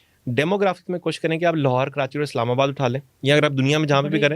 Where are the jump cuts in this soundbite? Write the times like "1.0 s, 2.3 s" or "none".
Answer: none